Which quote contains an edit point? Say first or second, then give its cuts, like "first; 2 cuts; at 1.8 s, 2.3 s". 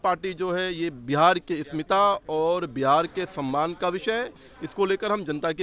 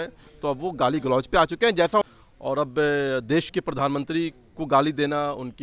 second; 1 cut; at 2.0 s